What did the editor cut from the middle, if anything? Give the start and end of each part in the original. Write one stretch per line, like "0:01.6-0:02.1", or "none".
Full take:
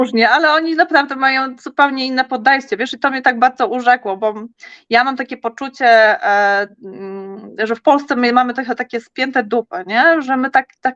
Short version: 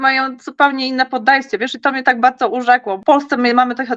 0:04.2-0:07.8

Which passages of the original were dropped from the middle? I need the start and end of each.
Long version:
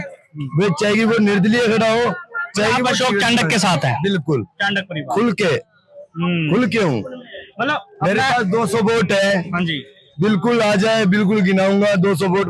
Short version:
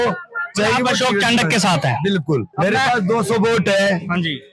0:04.5-0:07.9

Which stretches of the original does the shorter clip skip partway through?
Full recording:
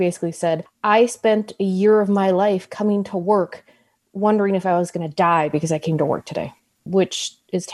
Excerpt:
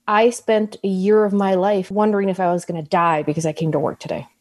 0:02.6-0:04.1

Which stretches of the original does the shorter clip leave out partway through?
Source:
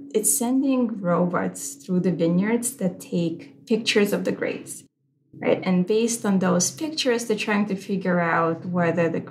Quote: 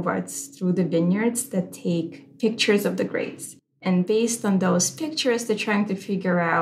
0:05.1-0:05.6

